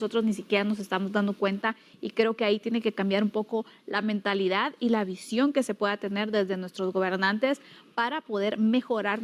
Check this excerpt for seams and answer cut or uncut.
uncut